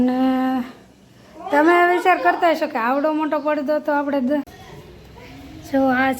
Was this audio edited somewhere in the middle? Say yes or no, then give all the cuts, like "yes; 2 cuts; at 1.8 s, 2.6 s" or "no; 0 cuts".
yes; 1 cut; at 5.1 s